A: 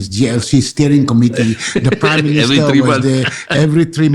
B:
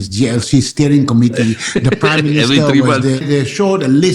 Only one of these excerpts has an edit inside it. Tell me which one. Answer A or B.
B